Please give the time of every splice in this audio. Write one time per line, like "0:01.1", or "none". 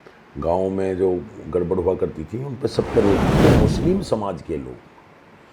0:03.4